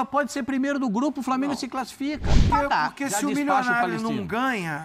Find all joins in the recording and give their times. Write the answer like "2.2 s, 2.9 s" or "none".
2.5 s